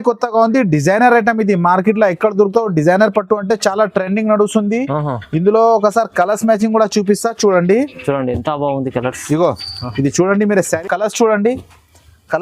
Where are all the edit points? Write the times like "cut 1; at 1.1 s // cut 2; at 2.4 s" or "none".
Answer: cut 1; at 10.7 s